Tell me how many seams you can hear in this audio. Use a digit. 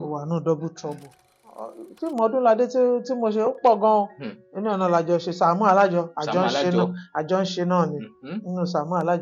1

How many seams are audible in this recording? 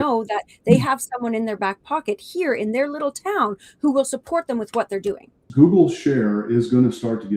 1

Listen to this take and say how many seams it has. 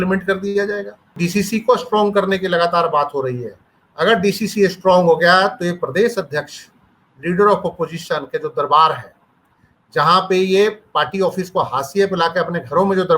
1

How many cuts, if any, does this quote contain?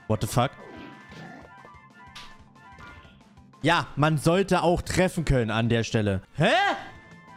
1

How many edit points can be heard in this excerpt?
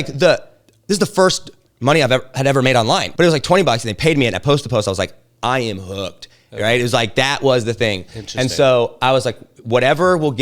1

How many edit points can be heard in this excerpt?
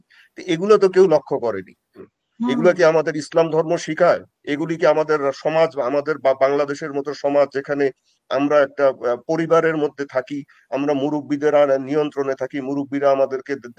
1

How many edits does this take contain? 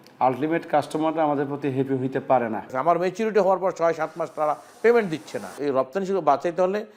2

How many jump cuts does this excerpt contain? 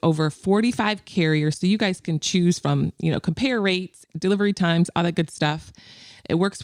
0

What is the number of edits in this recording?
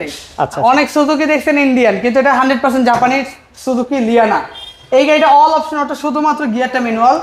0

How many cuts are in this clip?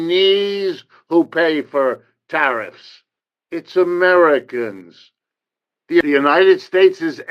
1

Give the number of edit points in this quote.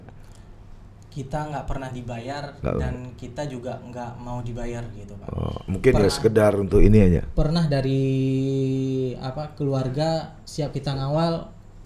0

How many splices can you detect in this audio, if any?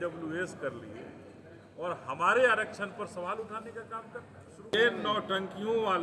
1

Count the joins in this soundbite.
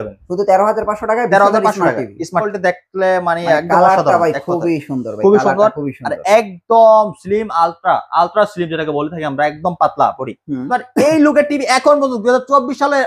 2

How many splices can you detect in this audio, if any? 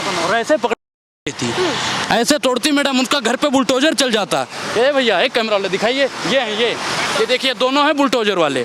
0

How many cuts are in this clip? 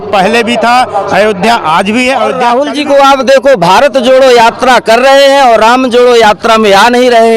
1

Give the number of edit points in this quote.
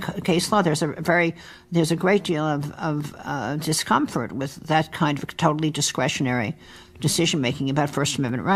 0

